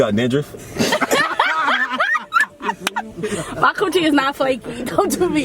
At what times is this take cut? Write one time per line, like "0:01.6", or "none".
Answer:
0:03.2